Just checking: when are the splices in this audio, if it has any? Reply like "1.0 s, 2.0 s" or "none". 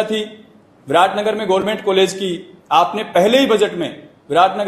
none